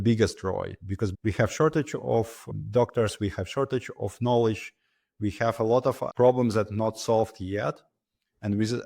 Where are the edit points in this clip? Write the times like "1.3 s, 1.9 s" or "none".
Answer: 1.1 s, 6.1 s